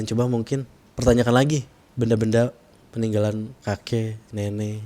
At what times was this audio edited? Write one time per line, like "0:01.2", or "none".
0:01.8
0:03.5

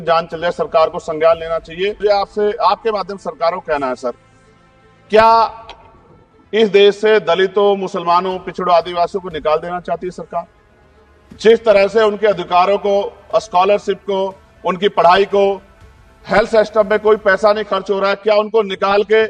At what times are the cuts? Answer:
0:02.0

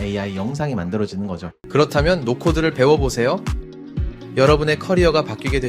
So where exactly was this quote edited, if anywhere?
0:01.5

